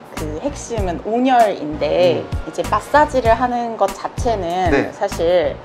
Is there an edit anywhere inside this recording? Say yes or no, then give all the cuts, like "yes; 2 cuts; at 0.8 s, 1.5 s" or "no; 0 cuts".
no; 0 cuts